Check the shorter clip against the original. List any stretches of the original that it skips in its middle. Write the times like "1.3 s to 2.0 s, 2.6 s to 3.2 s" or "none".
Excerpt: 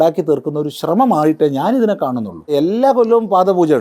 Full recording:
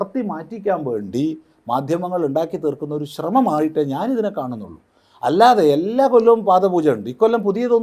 4.9 s to 5.7 s